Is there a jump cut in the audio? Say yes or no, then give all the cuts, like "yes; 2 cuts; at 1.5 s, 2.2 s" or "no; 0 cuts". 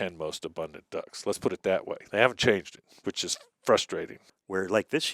yes; 1 cut; at 4.2 s